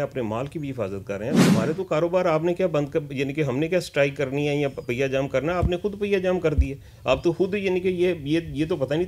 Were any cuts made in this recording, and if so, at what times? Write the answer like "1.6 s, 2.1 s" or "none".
1.4 s